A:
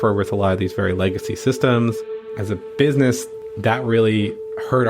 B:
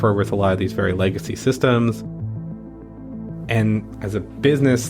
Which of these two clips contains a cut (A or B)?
A